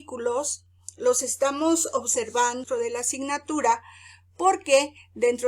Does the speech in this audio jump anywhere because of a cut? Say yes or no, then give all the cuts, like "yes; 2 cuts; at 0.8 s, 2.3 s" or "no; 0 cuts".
yes; 1 cut; at 2.6 s